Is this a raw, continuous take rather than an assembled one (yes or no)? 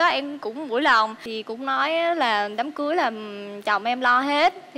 no